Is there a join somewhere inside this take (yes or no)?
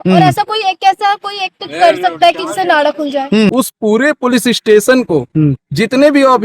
yes